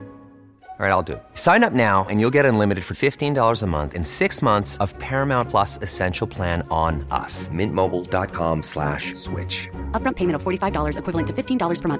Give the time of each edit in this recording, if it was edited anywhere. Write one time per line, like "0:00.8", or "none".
none